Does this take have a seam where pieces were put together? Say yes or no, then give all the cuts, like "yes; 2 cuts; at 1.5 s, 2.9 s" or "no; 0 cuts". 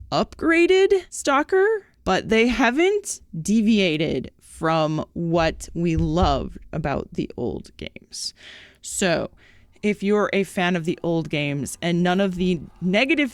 yes; 2 cuts; at 1.1 s, 1.9 s